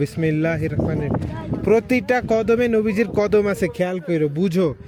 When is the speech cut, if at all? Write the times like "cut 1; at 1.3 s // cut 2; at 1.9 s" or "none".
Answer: none